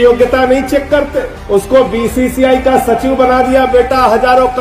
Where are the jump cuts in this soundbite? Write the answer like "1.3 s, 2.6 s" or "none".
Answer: none